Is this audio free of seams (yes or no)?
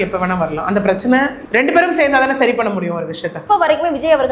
no